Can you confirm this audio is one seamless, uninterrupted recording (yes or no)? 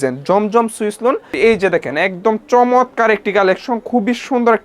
no